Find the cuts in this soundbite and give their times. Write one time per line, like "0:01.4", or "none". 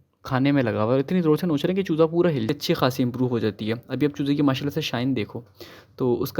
0:02.5